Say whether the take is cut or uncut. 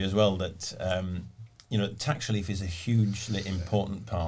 uncut